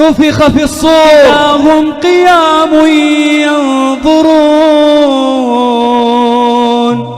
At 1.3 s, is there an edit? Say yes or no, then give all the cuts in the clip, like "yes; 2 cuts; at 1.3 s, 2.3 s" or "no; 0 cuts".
yes; 1 cut; at 1.3 s